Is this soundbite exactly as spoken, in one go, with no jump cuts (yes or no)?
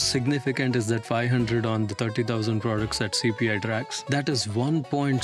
yes